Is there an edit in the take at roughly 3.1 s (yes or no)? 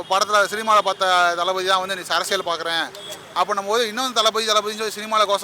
yes